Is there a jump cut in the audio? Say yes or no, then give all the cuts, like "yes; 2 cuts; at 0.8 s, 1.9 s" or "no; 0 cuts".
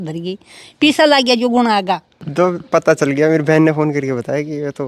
yes; 1 cut; at 2.1 s